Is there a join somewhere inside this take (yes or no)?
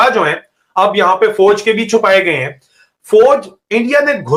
no